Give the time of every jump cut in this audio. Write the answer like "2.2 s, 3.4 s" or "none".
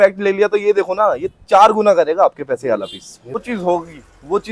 3.4 s